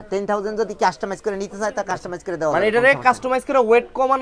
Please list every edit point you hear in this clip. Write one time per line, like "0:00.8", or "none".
none